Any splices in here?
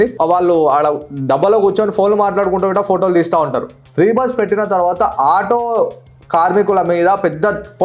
yes; 1 cut; at 3.8 s

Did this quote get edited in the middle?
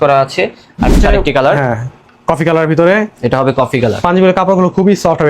yes; 1 cut; at 1.0 s

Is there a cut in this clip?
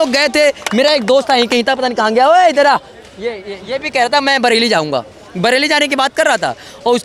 no; 0 cuts

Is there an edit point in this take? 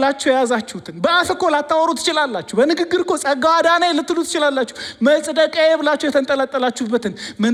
no; 0 cuts

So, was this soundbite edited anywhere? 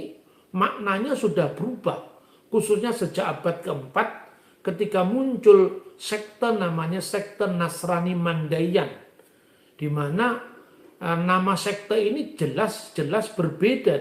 no; 0 cuts

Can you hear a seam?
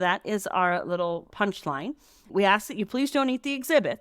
yes; 1 cut; at 2.3 s

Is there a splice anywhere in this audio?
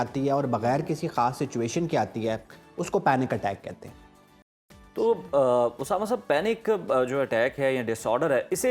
no; 0 cuts

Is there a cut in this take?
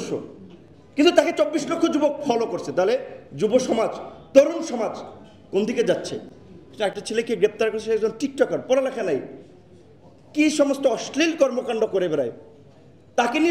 no; 0 cuts

